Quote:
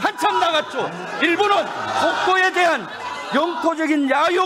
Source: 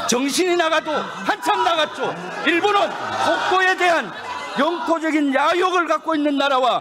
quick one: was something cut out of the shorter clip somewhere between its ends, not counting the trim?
no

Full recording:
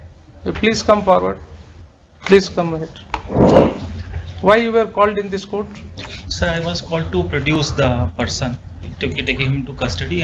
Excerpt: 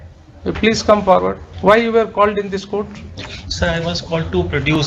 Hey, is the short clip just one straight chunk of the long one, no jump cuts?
no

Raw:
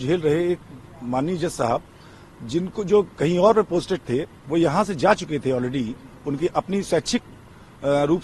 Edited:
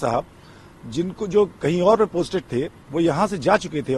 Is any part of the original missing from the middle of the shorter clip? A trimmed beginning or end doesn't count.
no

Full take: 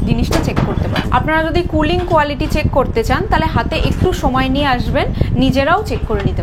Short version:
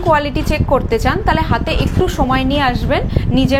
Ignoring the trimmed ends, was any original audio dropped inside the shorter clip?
no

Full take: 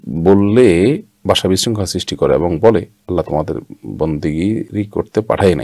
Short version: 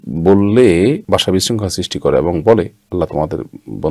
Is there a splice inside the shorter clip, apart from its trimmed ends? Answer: yes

